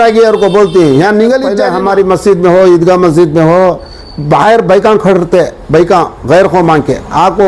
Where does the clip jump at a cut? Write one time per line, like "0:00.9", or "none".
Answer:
0:01.6

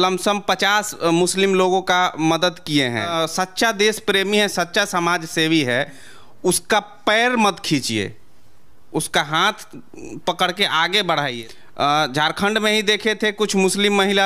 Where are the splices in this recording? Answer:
0:03.1
0:11.3

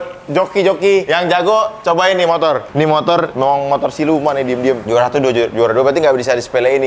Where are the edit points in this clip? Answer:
0:01.1
0:03.0
0:04.8

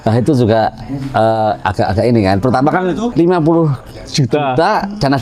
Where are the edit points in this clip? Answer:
0:03.1

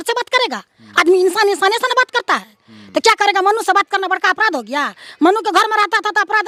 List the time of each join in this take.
none

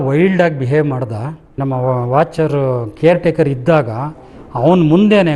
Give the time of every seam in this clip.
0:01.6

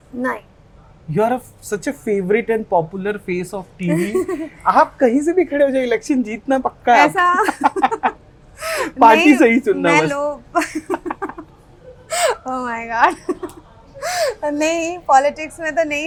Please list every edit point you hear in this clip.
none

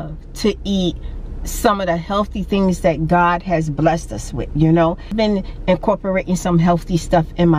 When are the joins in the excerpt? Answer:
0:05.1

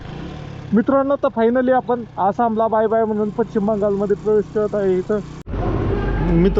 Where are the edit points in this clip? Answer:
0:05.4

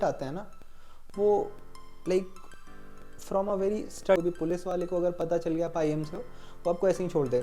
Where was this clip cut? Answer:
0:04.2

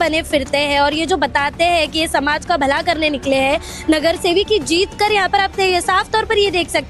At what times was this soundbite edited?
none

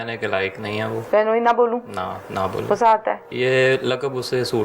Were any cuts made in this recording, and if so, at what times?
0:01.0
0:03.3

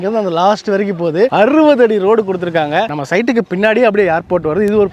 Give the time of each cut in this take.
0:02.9

